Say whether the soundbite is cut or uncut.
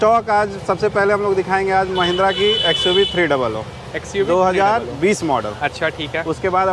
uncut